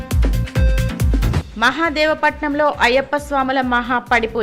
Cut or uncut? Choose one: cut